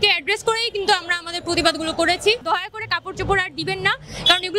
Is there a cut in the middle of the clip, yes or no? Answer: yes